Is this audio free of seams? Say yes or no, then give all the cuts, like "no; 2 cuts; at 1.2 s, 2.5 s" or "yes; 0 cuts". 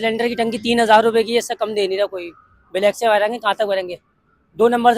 yes; 0 cuts